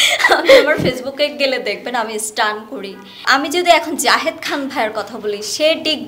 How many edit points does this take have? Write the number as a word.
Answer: one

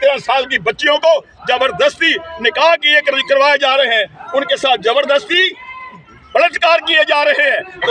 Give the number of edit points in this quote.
zero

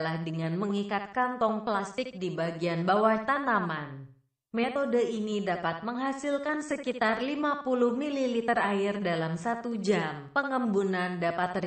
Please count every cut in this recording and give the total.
one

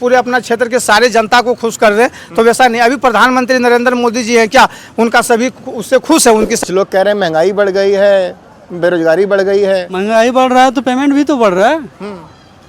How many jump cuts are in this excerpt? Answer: one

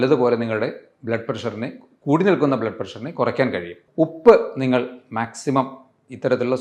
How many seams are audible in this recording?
one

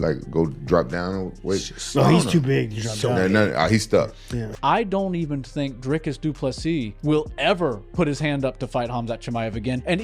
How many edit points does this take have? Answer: one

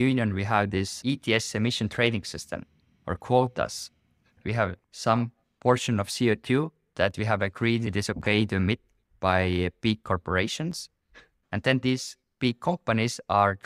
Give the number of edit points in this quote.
four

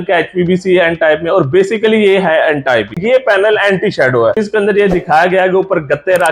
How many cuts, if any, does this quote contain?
two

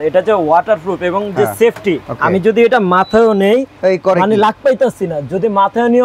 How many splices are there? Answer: one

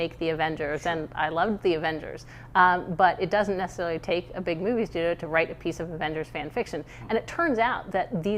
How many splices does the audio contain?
zero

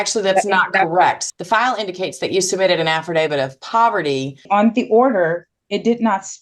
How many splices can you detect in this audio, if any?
two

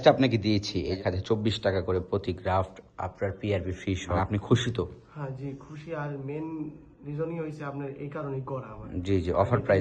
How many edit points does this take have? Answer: two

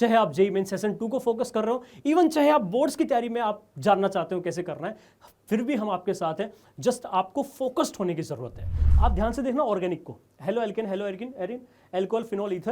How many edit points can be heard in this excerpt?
one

